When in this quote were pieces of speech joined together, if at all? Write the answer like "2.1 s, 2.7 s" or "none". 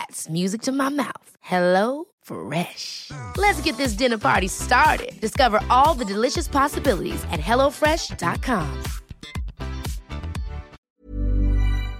10.7 s